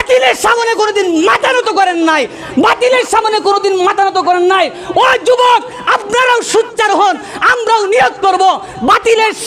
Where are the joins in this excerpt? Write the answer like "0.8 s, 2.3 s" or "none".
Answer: none